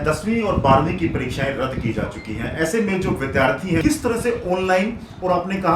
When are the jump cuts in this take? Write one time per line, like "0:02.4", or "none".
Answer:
0:03.8